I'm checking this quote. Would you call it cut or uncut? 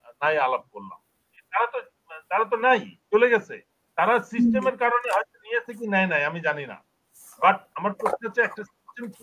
cut